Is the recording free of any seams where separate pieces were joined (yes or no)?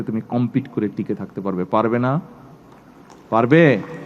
yes